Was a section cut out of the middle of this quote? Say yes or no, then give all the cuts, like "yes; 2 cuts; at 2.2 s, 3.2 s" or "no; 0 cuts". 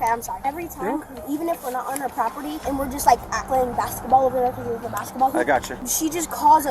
no; 0 cuts